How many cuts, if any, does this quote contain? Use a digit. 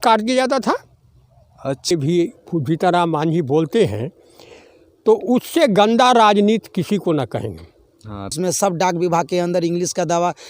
2